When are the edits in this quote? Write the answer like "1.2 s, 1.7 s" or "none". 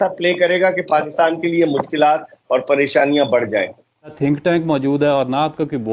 4.2 s